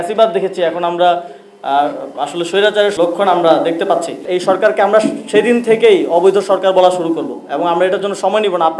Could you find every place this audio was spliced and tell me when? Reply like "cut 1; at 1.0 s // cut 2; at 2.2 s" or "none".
cut 1; at 2.9 s // cut 2; at 4.2 s